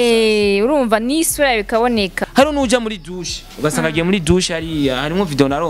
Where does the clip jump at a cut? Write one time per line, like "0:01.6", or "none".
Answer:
0:02.2

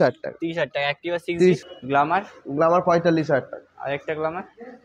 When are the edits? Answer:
0:01.7

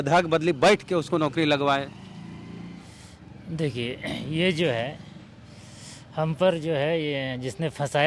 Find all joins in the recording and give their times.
none

